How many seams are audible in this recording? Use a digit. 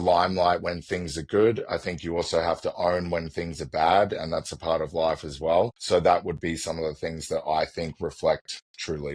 1